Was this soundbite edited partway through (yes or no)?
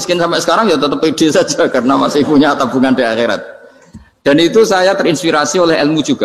no